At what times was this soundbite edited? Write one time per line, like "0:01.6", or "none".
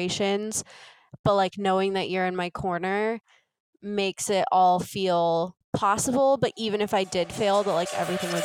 0:05.6